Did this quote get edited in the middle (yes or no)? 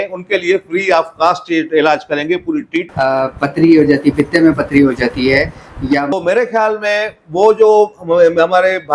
yes